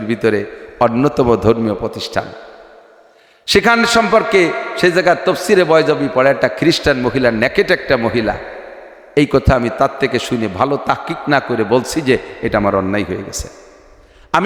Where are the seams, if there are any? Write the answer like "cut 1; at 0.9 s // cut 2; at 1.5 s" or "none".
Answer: none